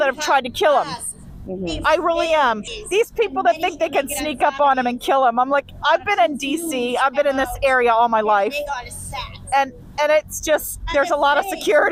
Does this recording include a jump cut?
no; 0 cuts

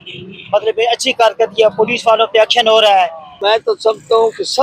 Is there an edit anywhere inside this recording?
yes; 1 cut; at 3.4 s

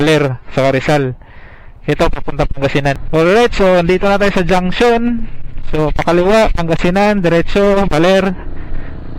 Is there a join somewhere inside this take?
yes; 1 cut; at 3.0 s

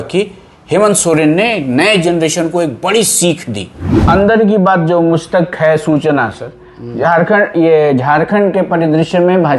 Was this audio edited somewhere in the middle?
yes; 1 cut; at 3.9 s

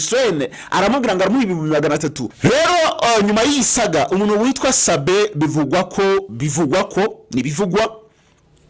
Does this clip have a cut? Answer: yes; 1 cut; at 2.3 s

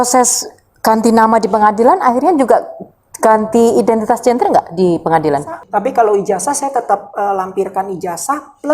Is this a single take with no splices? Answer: no; 1 cut; at 5.6 s

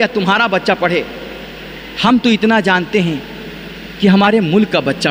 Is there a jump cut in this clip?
no; 0 cuts

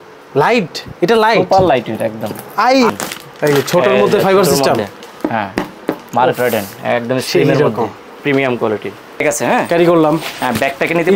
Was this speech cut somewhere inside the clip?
yes; 2 cuts; at 2.9 s, 9.2 s

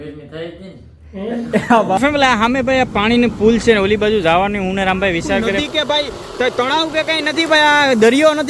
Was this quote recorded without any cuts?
no; 2 cuts; at 2.0 s, 5.5 s

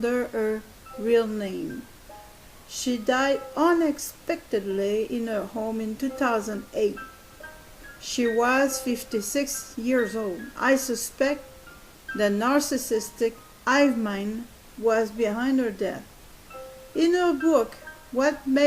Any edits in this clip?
yes; 1 cut; at 17.7 s

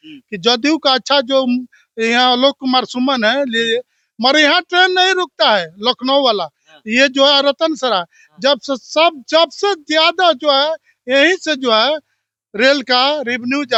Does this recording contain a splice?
no; 0 cuts

